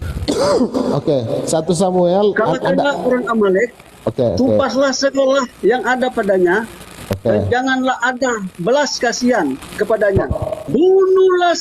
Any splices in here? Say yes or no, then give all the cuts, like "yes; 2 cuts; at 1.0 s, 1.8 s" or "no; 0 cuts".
yes; 2 cuts; at 5.5 s, 10.7 s